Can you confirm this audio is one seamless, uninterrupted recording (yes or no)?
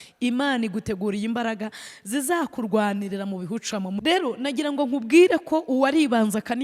no